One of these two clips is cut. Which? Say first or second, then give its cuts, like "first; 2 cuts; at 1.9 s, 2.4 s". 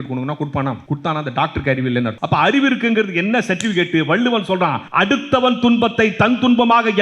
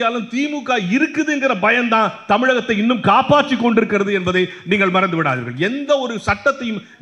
first; 3 cuts; at 0.8 s, 2.2 s, 4.8 s